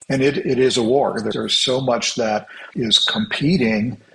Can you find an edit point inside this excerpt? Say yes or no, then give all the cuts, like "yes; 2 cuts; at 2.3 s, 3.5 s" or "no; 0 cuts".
yes; 2 cuts; at 1.3 s, 2.6 s